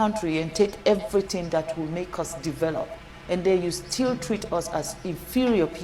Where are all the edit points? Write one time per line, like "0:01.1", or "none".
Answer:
none